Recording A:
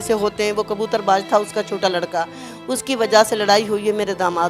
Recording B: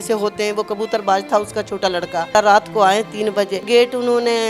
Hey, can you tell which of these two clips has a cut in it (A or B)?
B